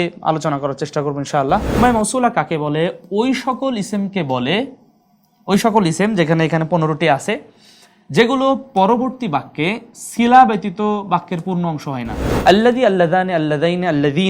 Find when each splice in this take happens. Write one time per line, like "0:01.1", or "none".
0:01.7
0:12.2